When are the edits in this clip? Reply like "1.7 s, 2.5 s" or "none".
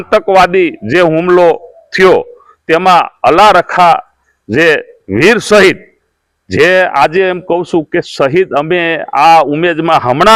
none